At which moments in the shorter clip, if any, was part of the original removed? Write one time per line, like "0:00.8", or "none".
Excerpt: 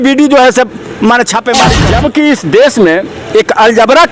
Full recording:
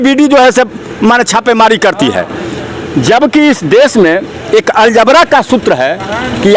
0:01.7